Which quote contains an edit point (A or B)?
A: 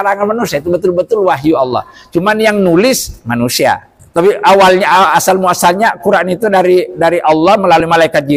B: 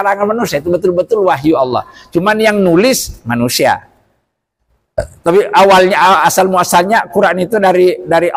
A